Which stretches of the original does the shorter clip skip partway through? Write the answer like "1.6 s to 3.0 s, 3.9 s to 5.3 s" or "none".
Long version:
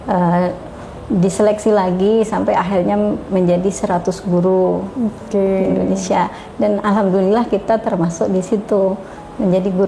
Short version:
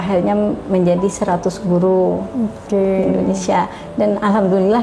none